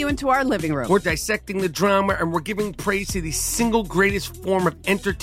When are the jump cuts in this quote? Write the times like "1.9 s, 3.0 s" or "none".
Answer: 1.0 s